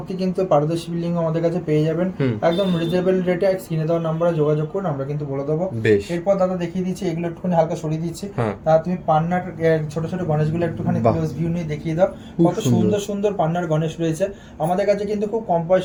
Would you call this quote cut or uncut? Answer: uncut